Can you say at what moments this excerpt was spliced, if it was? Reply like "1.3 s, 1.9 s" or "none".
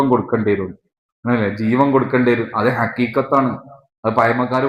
none